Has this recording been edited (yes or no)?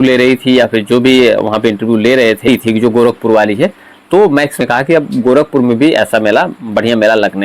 yes